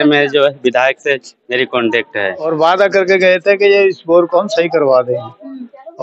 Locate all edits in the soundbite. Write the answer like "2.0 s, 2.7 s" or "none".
2.4 s